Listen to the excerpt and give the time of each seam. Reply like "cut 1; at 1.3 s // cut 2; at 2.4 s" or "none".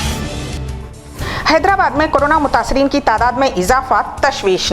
cut 1; at 0.9 s